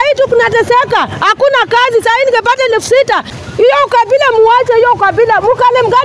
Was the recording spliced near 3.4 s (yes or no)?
yes